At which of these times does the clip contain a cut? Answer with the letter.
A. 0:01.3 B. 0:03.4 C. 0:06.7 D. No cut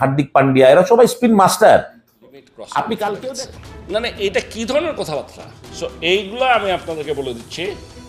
B